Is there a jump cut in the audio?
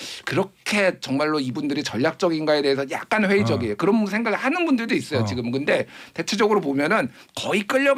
no; 0 cuts

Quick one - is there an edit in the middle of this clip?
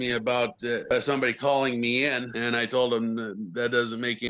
no; 0 cuts

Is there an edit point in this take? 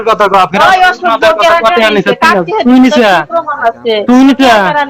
no; 0 cuts

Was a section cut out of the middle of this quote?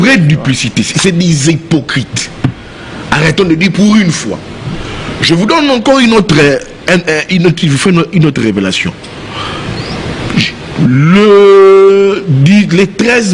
no; 0 cuts

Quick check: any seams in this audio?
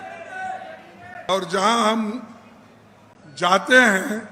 yes; 1 cut; at 1.3 s

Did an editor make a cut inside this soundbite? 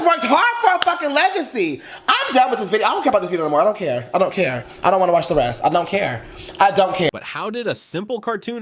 no; 0 cuts

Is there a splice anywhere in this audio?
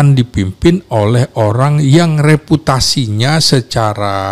no; 0 cuts

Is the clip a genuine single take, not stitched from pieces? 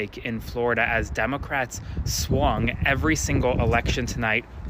yes; 0 cuts

